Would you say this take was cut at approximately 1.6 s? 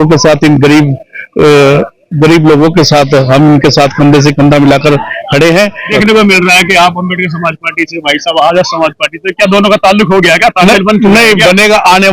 no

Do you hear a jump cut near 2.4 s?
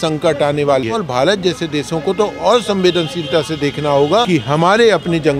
no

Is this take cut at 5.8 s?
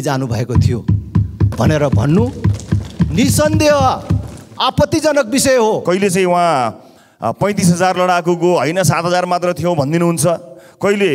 yes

